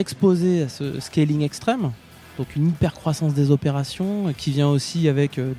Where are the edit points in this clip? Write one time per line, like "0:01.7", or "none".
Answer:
0:02.0